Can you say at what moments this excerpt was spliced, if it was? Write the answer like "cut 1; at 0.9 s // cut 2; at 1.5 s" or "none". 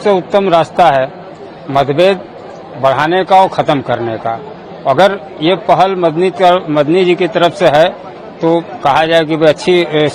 none